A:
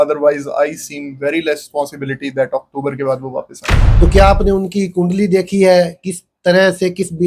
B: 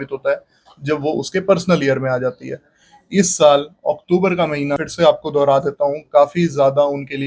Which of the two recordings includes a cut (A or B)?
B